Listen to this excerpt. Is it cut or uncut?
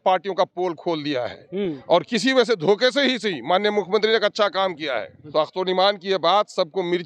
cut